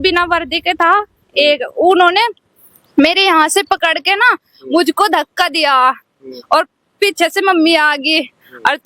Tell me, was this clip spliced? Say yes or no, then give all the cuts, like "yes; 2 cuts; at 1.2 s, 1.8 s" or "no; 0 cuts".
no; 0 cuts